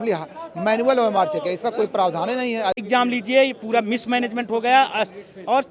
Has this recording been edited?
yes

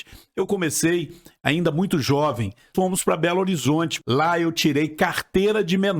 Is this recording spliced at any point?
yes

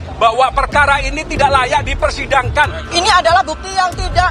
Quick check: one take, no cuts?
no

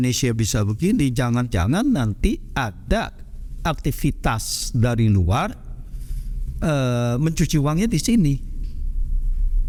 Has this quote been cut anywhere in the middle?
no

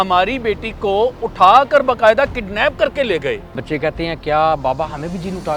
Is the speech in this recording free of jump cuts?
no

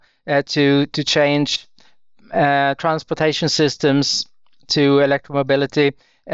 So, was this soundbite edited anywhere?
no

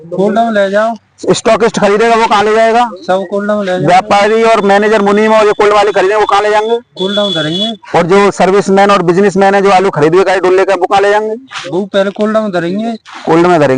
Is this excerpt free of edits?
yes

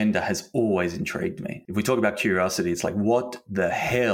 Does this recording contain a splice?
yes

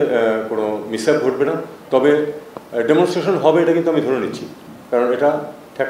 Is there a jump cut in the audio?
no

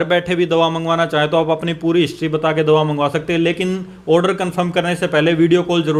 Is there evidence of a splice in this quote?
no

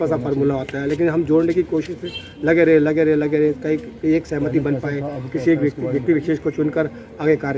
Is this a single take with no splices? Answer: yes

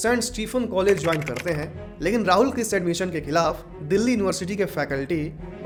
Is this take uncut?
yes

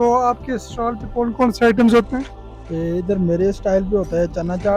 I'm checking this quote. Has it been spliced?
no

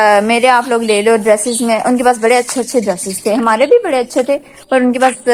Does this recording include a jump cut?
no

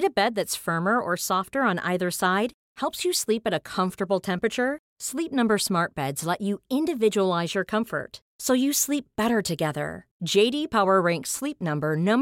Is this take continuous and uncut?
yes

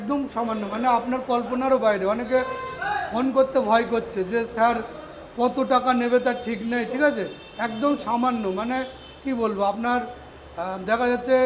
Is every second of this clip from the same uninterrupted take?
yes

